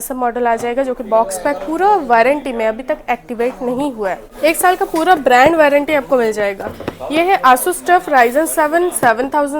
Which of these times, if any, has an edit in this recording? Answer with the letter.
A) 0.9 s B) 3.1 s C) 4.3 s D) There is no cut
C